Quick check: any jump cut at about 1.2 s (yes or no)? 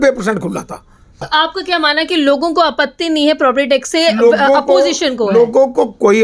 yes